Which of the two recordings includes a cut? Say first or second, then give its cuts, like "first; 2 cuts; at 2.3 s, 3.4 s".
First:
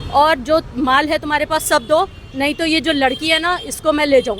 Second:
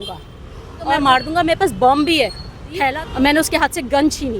second; 2 cuts; at 1.0 s, 2.9 s